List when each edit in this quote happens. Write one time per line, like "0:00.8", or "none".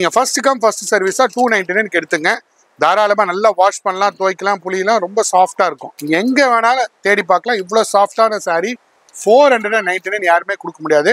0:05.9